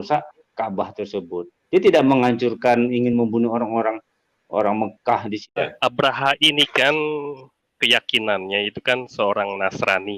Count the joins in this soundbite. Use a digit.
1